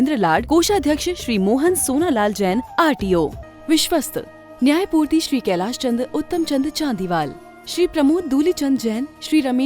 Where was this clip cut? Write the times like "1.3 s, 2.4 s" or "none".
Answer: 3.4 s